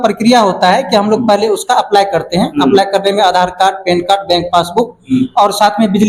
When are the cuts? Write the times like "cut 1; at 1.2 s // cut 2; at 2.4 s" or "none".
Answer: none